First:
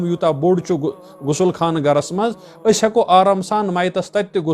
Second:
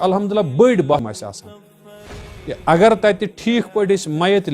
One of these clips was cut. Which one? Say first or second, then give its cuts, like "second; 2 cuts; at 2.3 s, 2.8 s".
second; 1 cut; at 0.9 s